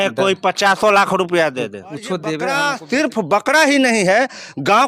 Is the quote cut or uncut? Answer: cut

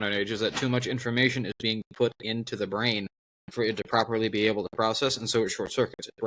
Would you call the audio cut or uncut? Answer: uncut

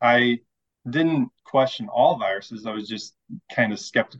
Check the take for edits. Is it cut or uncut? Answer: uncut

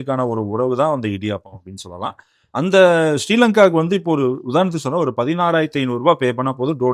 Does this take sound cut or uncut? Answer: uncut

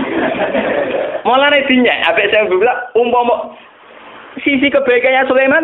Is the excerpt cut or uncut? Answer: uncut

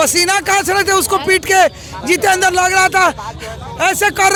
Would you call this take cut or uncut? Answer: uncut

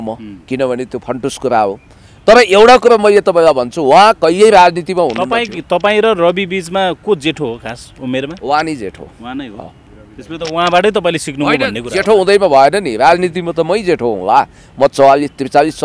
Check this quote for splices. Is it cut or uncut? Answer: uncut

